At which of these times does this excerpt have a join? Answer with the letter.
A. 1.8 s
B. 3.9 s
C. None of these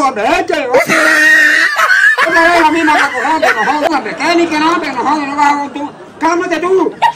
B